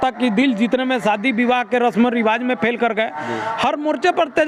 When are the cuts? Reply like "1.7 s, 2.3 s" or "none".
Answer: none